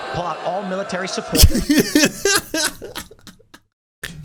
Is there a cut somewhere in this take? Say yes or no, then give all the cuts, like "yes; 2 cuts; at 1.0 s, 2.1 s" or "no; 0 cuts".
no; 0 cuts